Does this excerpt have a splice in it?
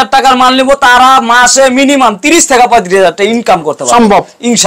no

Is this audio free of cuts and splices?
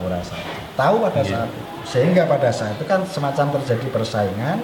yes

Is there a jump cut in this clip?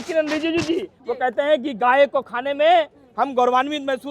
no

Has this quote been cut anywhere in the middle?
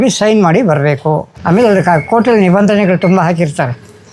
no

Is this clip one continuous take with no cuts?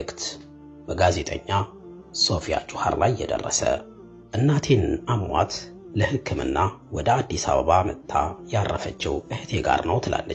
yes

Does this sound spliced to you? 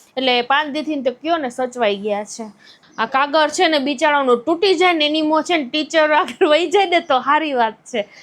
yes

